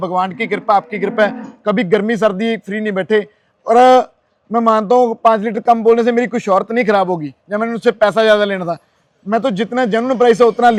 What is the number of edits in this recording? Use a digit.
0